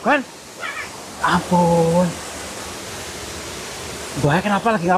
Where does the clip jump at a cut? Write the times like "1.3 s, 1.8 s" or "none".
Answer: 1.2 s